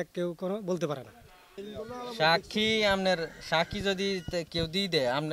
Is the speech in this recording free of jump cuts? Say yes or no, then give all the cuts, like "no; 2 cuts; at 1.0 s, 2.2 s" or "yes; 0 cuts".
no; 1 cut; at 1.6 s